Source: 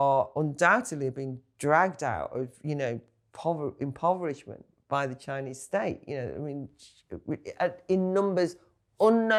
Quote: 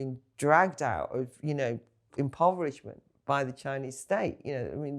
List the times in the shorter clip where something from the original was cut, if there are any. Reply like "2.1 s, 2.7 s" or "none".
2.1 s